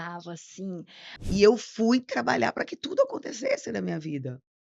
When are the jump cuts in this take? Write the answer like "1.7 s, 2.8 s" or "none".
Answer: 1.1 s